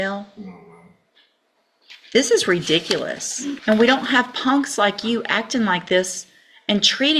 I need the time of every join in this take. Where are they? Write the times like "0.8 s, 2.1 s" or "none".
3.6 s